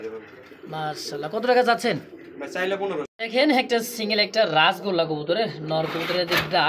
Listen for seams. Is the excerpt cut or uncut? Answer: cut